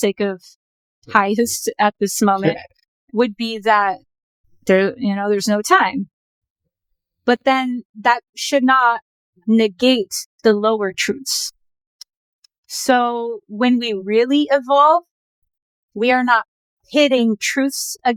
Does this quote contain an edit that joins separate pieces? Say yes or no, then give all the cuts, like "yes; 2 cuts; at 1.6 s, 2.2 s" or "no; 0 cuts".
no; 0 cuts